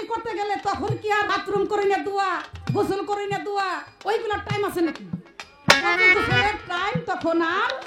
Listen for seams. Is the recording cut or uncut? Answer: cut